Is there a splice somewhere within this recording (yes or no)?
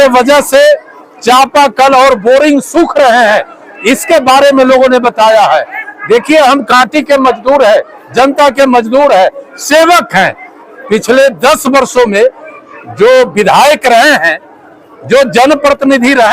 yes